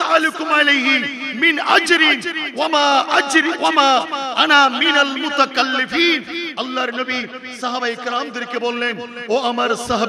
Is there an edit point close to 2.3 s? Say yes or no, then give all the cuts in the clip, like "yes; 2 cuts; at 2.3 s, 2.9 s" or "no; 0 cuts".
no; 0 cuts